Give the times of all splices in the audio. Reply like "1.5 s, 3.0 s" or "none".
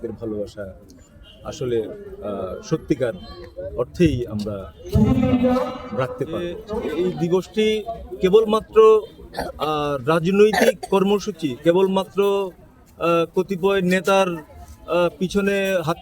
6.9 s

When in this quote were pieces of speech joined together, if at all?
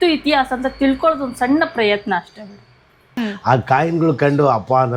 3.0 s

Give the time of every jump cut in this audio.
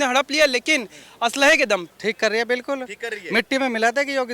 1.9 s

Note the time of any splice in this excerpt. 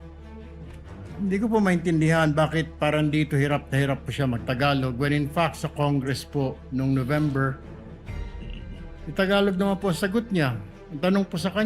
0.9 s

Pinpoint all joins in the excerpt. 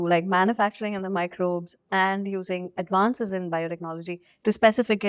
none

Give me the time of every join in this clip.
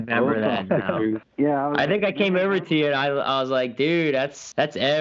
1.2 s

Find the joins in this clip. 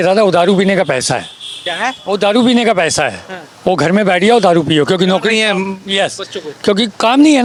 none

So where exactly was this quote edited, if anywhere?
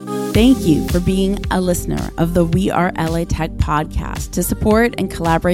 none

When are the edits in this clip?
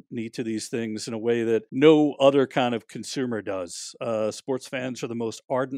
1.7 s

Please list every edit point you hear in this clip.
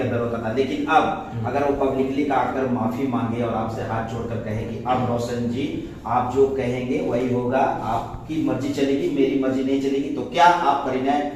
none

